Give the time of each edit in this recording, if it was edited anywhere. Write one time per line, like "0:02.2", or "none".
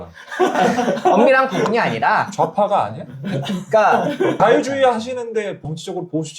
0:04.3